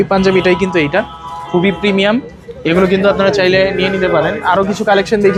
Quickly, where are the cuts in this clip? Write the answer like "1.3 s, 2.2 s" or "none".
none